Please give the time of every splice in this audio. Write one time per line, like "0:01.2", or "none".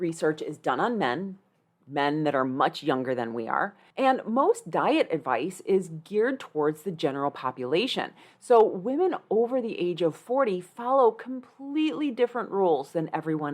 0:03.8

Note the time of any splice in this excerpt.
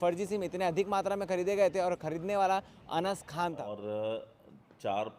0:03.7

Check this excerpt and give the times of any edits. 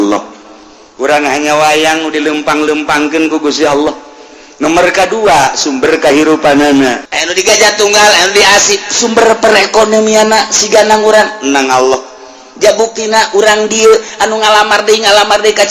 0:07.0

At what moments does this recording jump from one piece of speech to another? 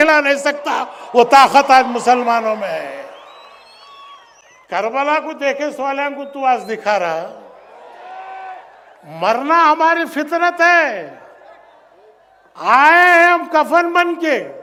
none

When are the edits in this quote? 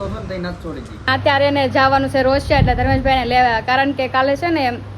0:01.1

